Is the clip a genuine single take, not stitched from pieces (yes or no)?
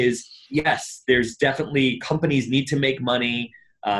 yes